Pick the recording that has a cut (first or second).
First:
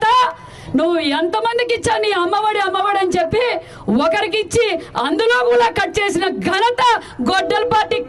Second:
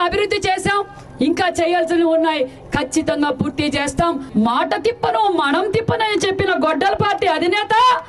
second